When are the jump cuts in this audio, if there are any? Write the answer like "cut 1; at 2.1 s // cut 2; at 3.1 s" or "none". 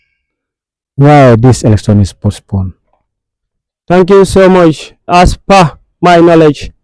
cut 1; at 5.1 s